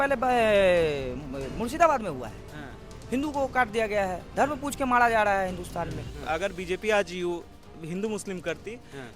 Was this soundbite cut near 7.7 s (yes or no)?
no